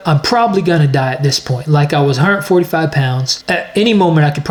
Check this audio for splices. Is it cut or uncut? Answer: uncut